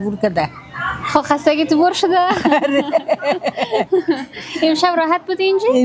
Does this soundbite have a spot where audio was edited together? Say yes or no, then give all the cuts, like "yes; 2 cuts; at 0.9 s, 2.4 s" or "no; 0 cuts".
no; 0 cuts